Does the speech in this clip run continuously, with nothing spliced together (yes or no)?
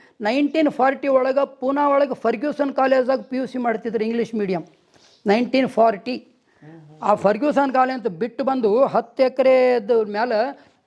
yes